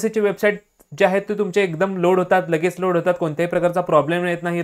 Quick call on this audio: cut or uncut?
uncut